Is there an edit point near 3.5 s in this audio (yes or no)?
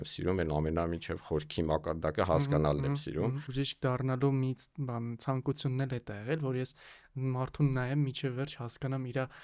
yes